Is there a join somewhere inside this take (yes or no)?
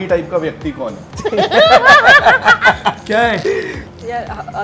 yes